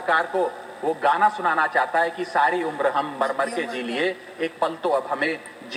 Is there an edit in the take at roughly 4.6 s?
no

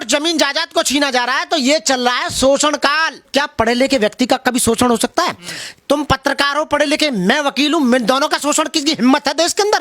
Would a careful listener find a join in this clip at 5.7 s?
no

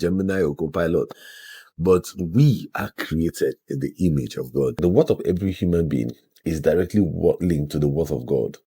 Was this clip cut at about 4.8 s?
yes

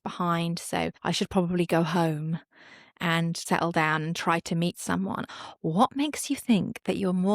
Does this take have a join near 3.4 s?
yes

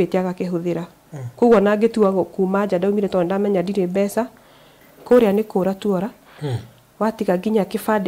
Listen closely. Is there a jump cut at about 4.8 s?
yes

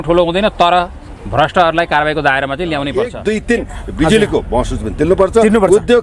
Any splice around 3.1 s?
yes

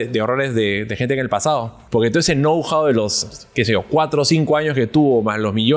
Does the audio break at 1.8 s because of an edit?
yes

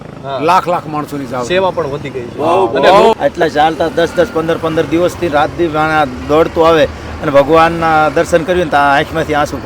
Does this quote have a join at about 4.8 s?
no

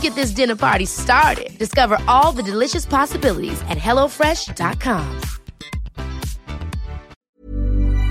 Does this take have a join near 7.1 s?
yes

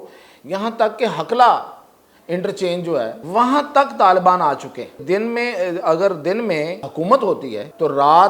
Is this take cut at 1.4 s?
no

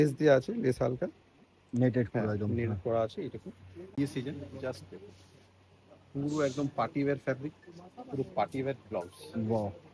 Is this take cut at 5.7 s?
no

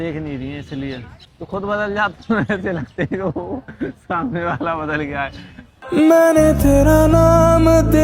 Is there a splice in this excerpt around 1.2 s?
yes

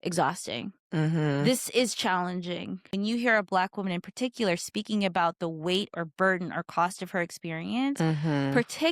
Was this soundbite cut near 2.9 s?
yes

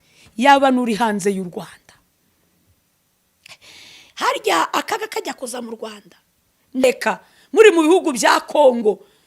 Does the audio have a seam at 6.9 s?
yes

